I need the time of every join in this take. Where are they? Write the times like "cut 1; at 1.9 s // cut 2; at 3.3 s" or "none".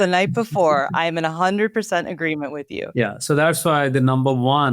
cut 1; at 2.8 s